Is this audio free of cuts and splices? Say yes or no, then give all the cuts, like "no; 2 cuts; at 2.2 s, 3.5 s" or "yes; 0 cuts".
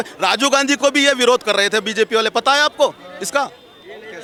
yes; 0 cuts